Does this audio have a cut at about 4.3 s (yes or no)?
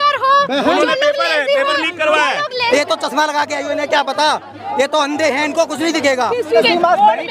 no